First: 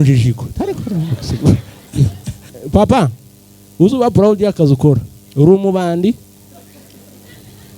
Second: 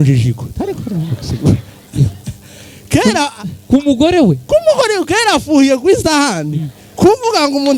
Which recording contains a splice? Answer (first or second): first